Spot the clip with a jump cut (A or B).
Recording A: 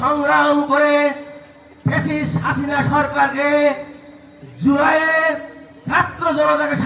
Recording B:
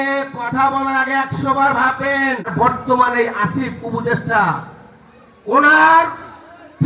B